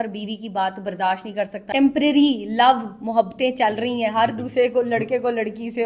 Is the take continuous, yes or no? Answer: no